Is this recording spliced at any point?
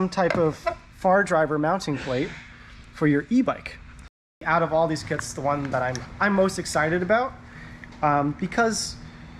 yes; 1 cut; at 4.4 s

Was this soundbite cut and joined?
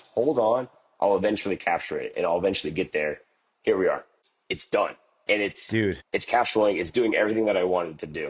yes; 1 cut; at 4.2 s

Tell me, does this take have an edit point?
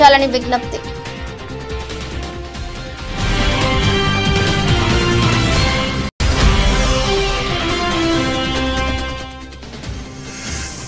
yes; 2 cuts; at 1.7 s, 6.2 s

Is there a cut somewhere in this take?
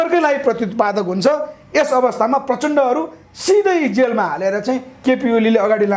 no; 0 cuts

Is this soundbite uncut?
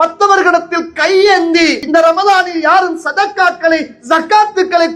no; 1 cut; at 1.8 s

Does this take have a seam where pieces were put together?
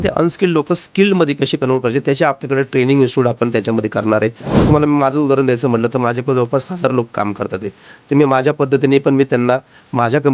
yes; 1 cut; at 4.5 s

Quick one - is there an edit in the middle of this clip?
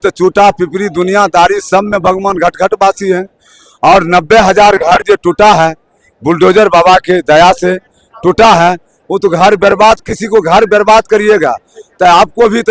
no; 0 cuts

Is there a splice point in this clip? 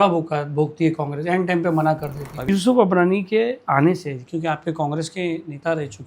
yes; 1 cut; at 2.5 s

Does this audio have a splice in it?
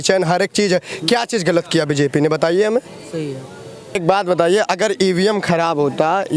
yes; 1 cut; at 4.0 s

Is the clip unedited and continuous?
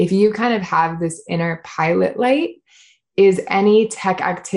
no; 1 cut; at 2.9 s

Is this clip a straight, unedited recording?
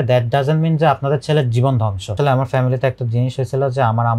no; 1 cut; at 2.1 s

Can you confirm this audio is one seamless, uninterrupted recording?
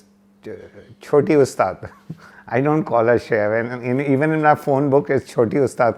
yes; 0 cuts

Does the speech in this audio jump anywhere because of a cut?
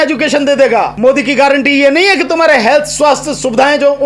yes; 1 cut; at 0.9 s

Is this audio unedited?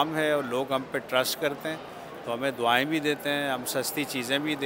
yes; 0 cuts

